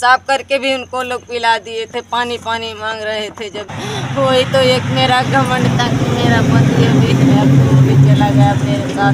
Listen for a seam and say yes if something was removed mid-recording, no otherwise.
yes